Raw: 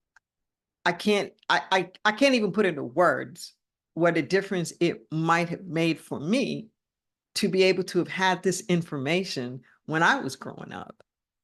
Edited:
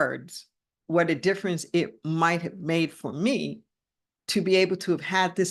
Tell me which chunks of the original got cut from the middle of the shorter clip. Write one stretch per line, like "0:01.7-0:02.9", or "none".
none